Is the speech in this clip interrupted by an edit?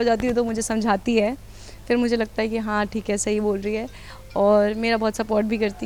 no; 0 cuts

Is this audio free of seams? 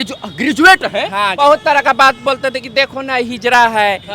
no; 1 cut; at 1.3 s

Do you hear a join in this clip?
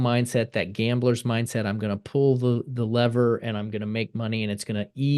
no; 0 cuts

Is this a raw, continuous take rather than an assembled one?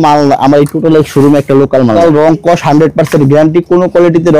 no; 1 cut; at 2.0 s

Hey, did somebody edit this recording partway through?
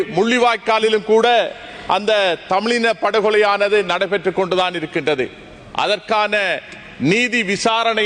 no; 0 cuts

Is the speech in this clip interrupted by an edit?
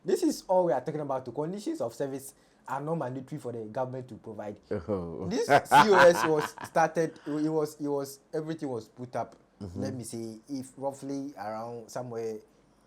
yes; 1 cut; at 4.6 s

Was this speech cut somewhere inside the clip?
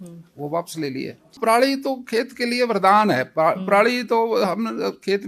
yes; 1 cut; at 1.4 s

